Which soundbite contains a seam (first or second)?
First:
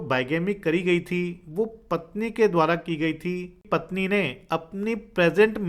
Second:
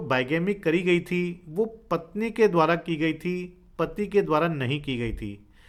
first